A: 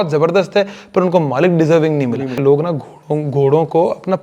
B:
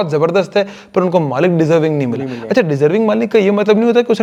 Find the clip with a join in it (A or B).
A